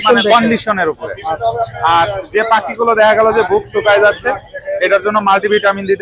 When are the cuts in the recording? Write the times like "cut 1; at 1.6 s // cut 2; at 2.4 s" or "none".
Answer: none